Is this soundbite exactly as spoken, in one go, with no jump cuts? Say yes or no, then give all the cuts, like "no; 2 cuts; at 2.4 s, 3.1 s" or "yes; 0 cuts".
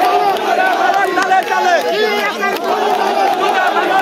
yes; 0 cuts